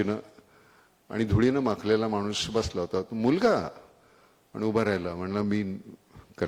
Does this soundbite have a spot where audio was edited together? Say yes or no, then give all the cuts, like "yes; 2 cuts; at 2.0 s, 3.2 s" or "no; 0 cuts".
no; 0 cuts